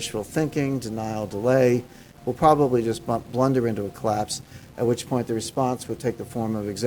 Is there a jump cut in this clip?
yes; 1 cut; at 2.1 s

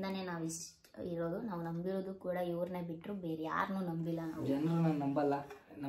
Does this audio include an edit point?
no; 0 cuts

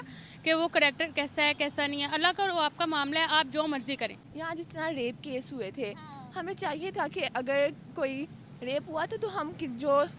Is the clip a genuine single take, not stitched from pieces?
no; 1 cut; at 4.2 s

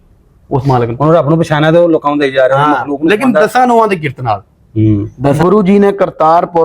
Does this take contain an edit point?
yes; 1 cut; at 5.4 s

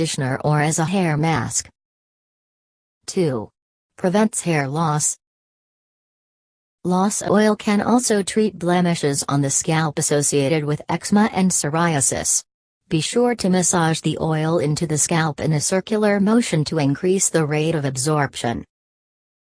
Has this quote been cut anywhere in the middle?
no; 0 cuts

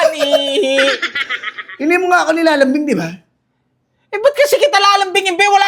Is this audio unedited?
yes; 0 cuts

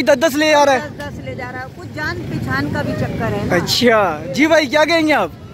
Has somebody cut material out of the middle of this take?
no; 0 cuts

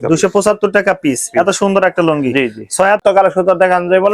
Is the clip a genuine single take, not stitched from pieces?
no; 1 cut; at 3.0 s

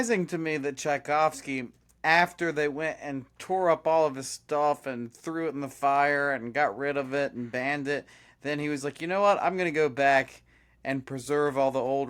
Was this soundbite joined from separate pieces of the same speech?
no; 0 cuts

